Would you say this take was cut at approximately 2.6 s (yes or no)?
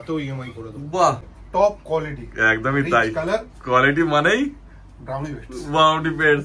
no